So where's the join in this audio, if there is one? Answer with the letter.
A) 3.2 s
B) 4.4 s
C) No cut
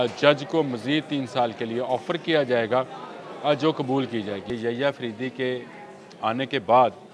B